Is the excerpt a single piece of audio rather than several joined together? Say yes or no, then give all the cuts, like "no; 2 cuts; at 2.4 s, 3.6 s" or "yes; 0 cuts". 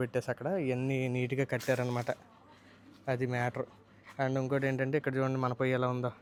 yes; 0 cuts